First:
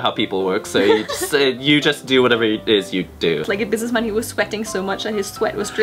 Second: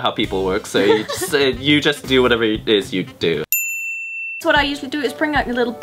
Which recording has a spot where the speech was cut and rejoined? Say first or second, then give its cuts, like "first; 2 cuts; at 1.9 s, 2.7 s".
first; 1 cut; at 3.4 s